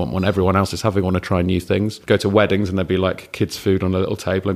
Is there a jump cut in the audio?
yes; 1 cut; at 2.0 s

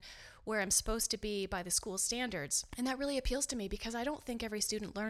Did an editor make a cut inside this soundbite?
yes; 1 cut; at 2.6 s

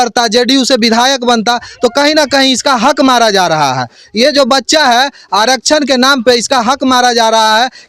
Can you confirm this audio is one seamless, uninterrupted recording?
yes; 0 cuts

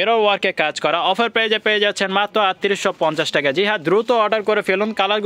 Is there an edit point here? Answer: no; 0 cuts

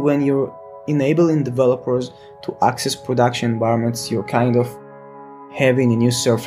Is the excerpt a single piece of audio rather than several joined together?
no; 1 cut; at 5.4 s

